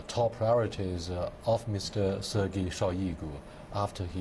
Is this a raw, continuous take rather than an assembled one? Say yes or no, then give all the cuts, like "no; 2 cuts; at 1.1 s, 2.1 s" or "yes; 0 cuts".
no; 1 cut; at 2.9 s